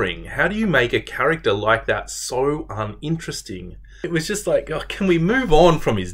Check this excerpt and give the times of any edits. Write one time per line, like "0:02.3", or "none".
0:04.1